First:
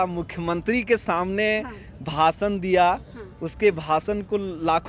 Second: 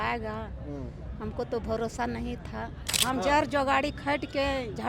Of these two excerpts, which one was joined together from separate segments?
second; 1 cut; at 2.9 s

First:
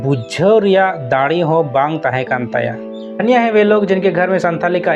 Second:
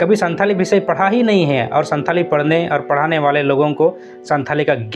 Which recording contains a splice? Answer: first; 1 cut; at 3.2 s

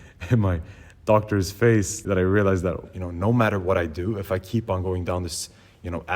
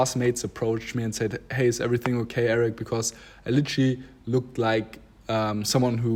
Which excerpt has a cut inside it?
first; 2 cuts; at 2.0 s, 2.9 s

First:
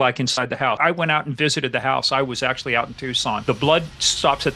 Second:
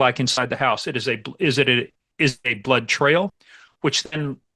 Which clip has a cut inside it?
first; 2 cuts; at 0.8 s, 3.4 s

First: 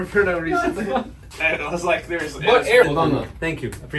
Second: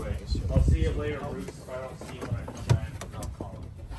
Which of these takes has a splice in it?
first; 1 cut; at 2.8 s

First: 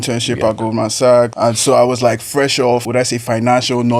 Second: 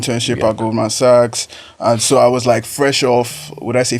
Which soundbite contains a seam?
first; 2 cuts; at 1.3 s, 2.9 s

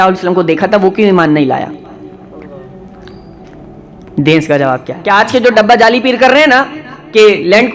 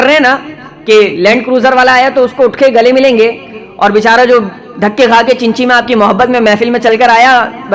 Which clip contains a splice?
first; 1 cut; at 4.9 s

